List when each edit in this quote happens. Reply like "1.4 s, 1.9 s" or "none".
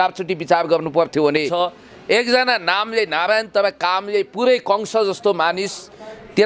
1.5 s